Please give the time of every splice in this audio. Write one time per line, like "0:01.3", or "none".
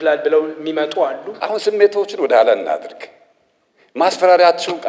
0:01.3

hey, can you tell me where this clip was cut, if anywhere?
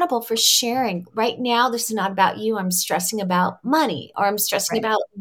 none

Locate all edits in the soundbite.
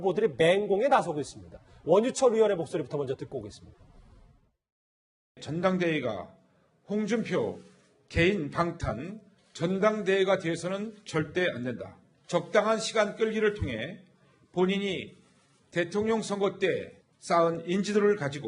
none

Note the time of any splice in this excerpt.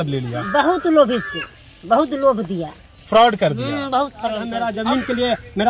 0:04.5

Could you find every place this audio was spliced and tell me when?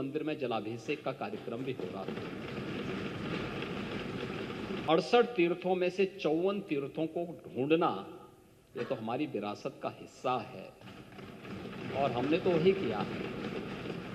0:04.8

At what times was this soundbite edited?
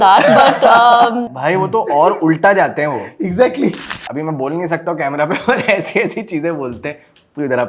0:01.3

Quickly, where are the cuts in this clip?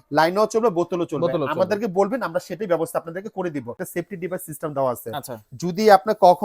0:03.8

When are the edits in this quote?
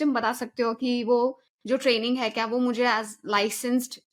none

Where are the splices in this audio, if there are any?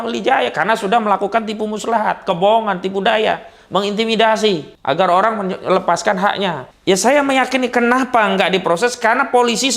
0:04.7
0:06.7

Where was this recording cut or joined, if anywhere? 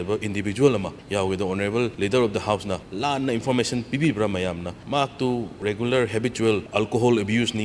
0:01.0
0:01.9
0:02.9
0:04.7
0:05.5
0:06.7

